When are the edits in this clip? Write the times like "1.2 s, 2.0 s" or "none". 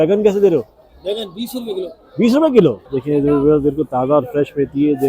2.9 s